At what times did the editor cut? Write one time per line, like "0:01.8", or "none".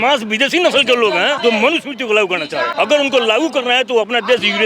0:01.4
0:02.7

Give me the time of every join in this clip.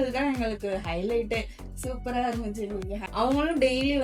0:03.0

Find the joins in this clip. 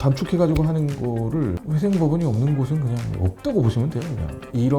0:01.0

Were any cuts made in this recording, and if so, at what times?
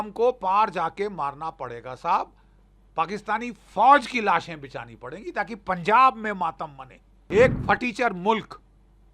0:07.1

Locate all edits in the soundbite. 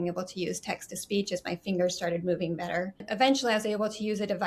0:03.0

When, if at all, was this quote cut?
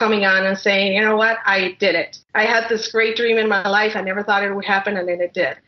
0:02.2

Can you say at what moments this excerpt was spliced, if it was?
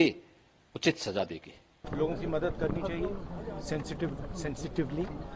0:01.9

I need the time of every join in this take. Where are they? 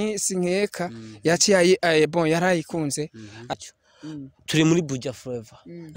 0:03.5

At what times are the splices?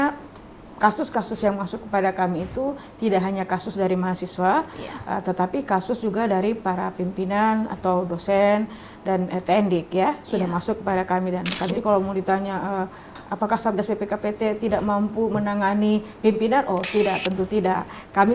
0:11.7
0:13.2

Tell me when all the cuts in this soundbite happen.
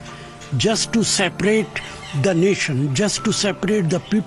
none

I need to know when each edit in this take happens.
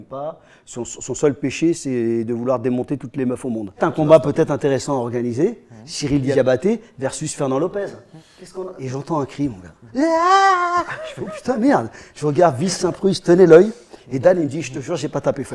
0:03.8
0:06.3
0:08.7

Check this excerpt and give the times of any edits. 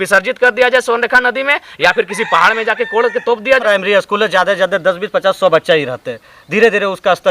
0:03.6

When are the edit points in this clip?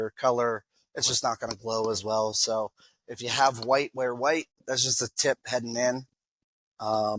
0:04.6

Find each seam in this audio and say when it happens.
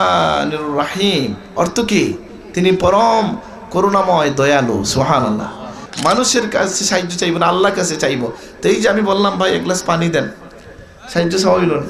0:05.8

